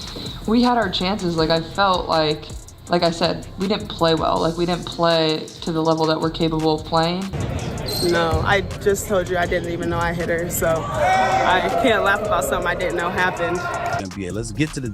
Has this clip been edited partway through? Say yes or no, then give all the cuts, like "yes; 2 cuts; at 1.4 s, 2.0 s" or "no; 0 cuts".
yes; 2 cuts; at 7.1 s, 13.9 s